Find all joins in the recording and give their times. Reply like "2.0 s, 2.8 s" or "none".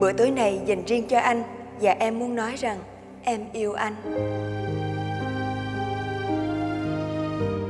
none